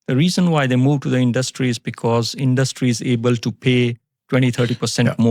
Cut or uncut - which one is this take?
uncut